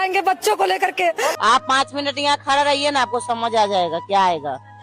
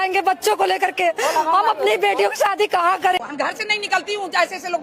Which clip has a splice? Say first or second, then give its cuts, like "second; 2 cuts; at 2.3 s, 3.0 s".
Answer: first; 1 cut; at 1.3 s